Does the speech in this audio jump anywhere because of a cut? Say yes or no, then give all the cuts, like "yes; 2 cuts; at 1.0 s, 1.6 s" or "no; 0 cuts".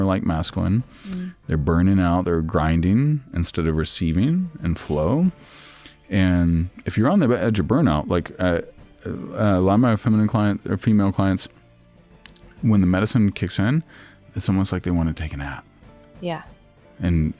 no; 0 cuts